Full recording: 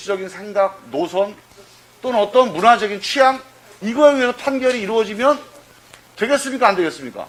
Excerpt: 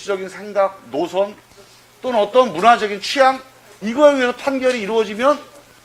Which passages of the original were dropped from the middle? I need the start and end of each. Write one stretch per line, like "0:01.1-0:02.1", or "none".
none